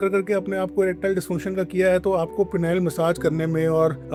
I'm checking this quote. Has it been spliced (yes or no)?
no